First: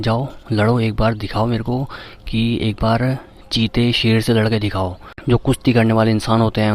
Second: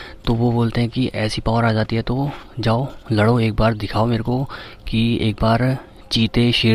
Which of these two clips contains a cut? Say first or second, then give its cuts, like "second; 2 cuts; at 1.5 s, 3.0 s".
first; 1 cut; at 5.1 s